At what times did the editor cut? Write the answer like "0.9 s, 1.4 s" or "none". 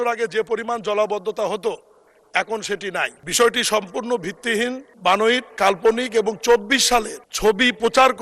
3.2 s, 4.9 s, 5.5 s, 7.2 s

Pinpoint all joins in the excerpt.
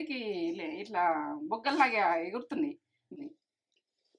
3.2 s

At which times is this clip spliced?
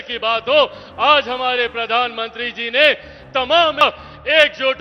3.8 s

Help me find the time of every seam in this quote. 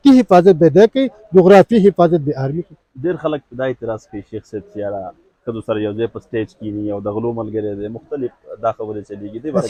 none

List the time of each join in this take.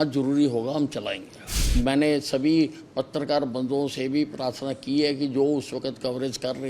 1.6 s

